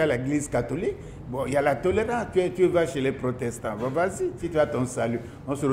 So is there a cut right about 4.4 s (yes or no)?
yes